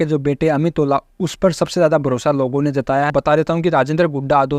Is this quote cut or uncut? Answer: cut